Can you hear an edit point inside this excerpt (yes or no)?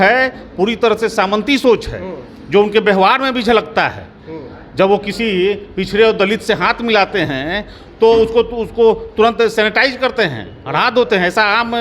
no